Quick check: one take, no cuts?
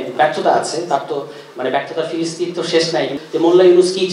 no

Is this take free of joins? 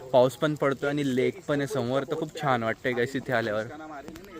yes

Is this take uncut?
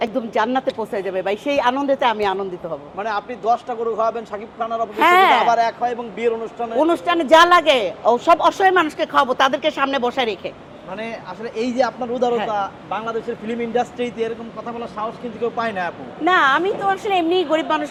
yes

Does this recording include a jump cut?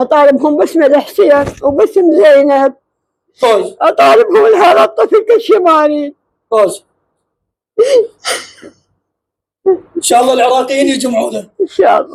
no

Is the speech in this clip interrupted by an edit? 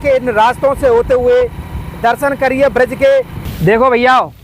yes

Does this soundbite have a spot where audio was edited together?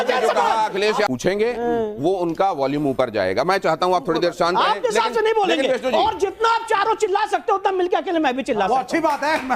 yes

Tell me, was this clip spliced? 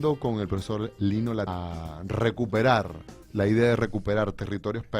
no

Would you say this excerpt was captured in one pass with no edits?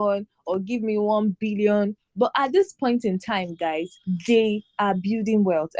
no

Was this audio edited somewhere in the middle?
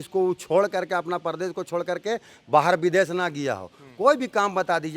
no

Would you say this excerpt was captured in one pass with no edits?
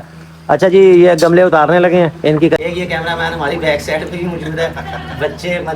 no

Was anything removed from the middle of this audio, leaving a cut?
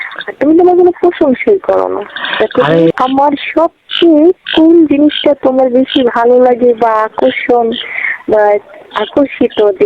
yes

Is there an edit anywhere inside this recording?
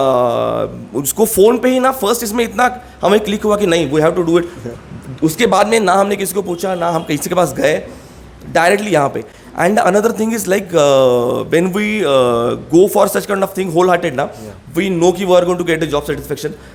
no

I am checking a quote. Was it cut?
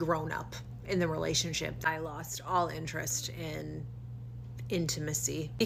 no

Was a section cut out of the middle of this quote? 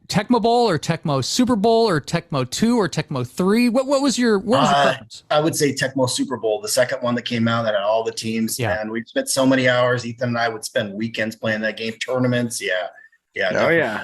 yes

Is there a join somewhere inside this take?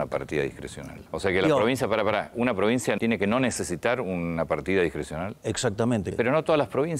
yes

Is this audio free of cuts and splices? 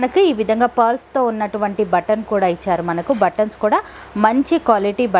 yes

